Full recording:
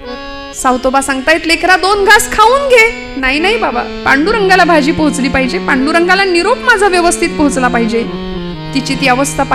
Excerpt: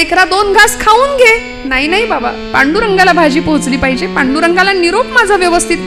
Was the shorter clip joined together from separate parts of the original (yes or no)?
no